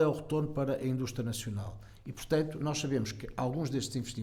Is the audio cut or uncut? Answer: uncut